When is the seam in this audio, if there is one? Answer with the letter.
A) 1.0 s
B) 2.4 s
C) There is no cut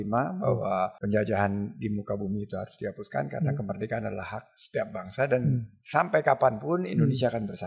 A